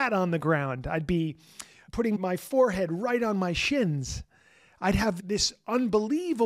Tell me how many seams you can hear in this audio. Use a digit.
2